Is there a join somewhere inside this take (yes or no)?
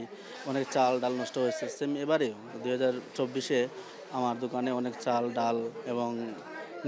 no